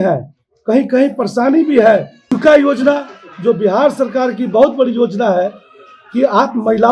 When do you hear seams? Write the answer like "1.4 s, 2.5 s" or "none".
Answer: 2.3 s